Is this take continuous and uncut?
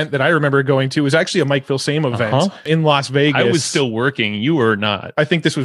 yes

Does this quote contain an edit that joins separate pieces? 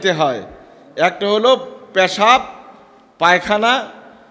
no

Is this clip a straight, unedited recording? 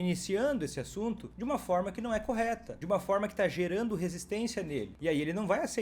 no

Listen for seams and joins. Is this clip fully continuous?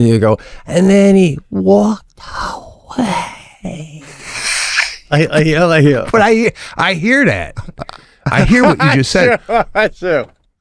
yes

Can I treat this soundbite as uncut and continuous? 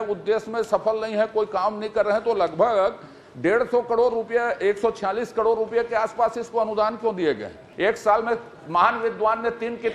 no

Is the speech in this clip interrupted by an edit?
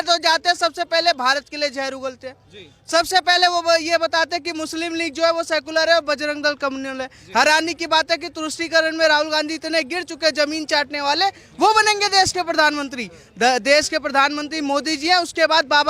no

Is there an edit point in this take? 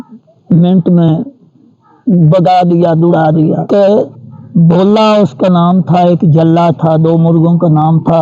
yes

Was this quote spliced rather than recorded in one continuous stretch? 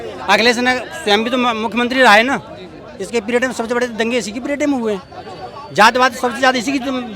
no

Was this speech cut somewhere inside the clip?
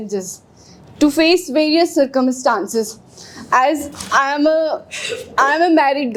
no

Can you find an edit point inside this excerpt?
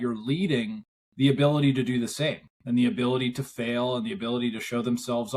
no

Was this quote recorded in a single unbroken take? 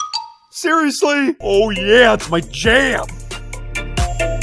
no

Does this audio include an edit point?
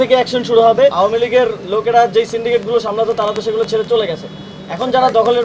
yes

